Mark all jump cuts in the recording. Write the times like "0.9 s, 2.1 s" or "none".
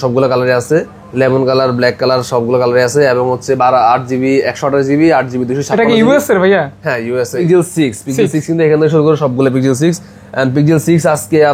7.4 s